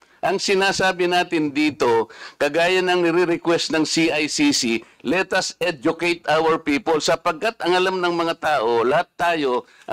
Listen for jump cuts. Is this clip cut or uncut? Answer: uncut